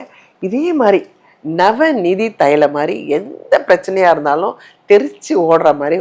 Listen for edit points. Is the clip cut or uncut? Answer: uncut